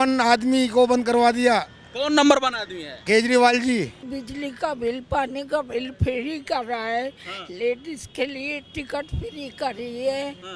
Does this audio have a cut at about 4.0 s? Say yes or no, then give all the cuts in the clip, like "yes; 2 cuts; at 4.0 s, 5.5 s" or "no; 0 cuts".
yes; 1 cut; at 4.0 s